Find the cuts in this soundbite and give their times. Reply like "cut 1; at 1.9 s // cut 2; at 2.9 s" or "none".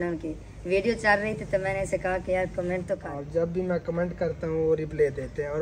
cut 1; at 3.1 s